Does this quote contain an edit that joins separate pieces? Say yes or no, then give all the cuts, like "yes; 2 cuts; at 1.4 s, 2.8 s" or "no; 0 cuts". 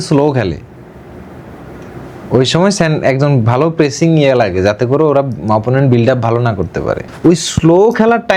yes; 1 cut; at 7.0 s